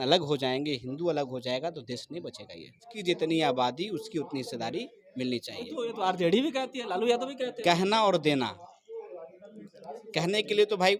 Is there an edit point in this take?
yes; 1 cut; at 2.9 s

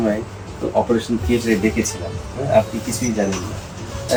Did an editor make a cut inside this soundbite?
no; 0 cuts

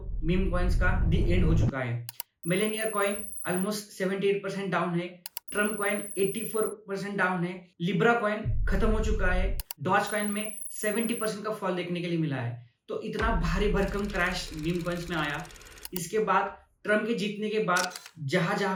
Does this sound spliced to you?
no; 0 cuts

